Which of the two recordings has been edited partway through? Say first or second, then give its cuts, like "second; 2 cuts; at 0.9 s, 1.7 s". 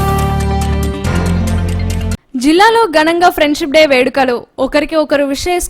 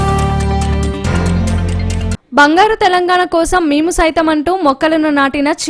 first; 1 cut; at 2.2 s